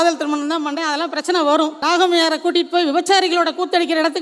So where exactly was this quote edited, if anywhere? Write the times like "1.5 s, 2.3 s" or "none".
1.8 s

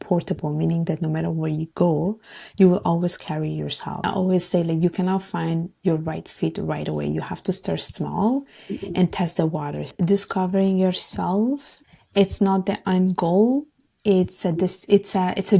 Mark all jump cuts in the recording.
4.1 s, 9.9 s, 11.8 s

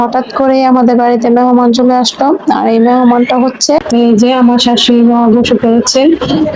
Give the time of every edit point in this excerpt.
3.8 s

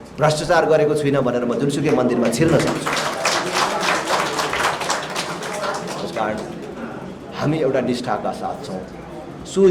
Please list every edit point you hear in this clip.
none

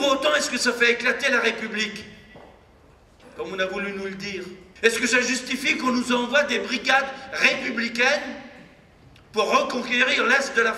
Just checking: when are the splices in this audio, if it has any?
4.6 s

